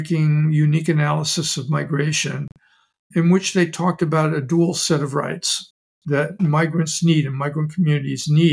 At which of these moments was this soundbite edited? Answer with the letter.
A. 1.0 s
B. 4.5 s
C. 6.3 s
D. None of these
C